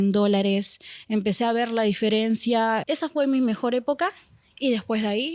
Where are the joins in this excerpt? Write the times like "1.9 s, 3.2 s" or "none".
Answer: 2.8 s